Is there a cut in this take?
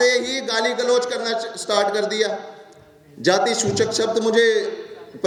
no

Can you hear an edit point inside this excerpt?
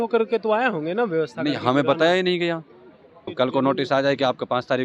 yes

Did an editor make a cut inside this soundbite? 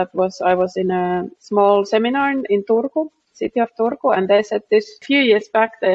yes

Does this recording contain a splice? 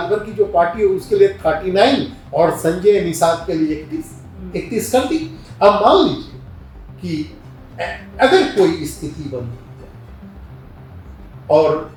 no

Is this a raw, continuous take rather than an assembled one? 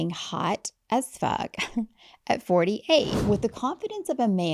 no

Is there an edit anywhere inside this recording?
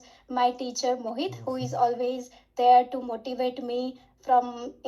no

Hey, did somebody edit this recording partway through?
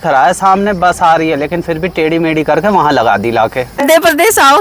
yes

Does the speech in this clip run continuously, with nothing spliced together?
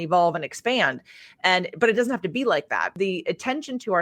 no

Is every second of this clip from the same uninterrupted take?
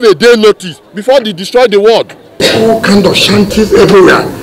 no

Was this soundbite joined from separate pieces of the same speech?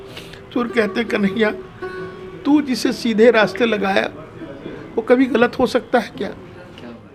no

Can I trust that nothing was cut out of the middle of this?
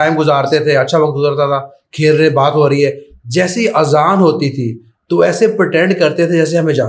yes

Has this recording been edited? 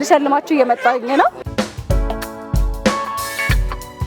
yes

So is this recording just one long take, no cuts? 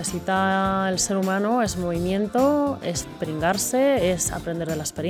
yes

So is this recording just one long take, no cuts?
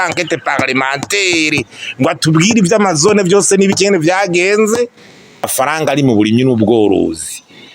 no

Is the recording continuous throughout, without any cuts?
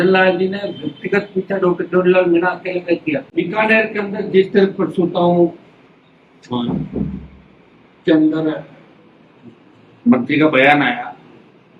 no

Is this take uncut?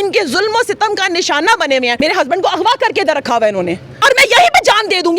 no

